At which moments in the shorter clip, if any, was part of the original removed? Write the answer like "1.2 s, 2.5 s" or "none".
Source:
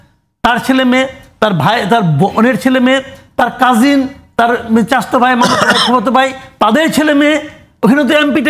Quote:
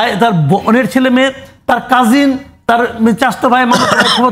none